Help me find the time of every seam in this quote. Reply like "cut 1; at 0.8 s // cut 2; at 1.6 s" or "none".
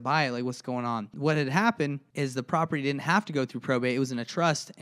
cut 1; at 1.1 s // cut 2; at 2.0 s